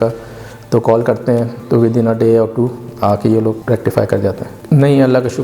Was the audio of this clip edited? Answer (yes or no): yes